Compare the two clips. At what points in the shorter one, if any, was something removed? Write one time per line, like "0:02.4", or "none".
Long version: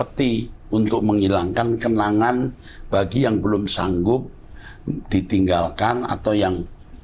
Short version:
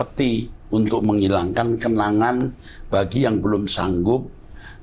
none